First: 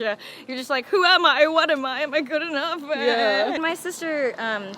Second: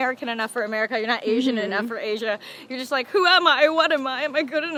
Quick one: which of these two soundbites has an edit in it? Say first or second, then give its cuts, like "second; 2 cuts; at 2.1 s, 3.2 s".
first; 1 cut; at 3.6 s